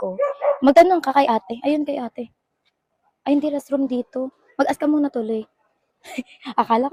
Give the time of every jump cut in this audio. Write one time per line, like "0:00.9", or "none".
none